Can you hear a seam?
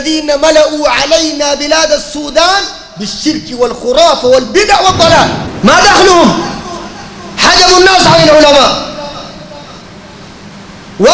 yes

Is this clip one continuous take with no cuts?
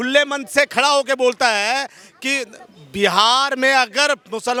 yes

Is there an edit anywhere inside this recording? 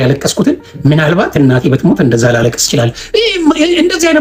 no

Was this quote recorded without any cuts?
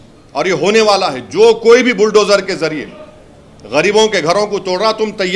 yes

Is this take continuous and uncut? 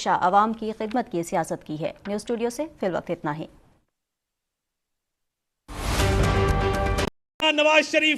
no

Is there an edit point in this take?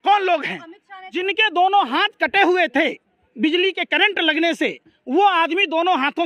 yes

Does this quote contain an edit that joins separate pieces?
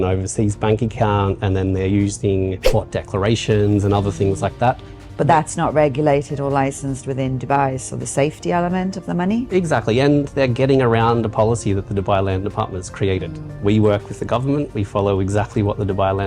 yes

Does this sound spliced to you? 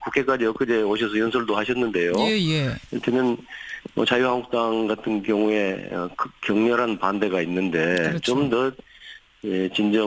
yes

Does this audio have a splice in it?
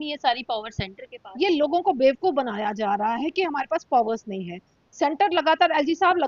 no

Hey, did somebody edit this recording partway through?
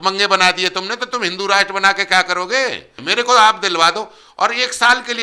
yes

